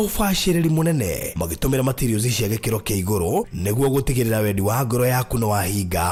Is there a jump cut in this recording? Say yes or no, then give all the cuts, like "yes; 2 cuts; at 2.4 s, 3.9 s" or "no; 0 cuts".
no; 0 cuts